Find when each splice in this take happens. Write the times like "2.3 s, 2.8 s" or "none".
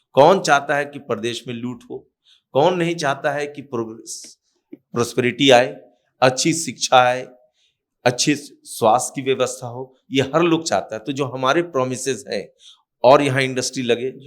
none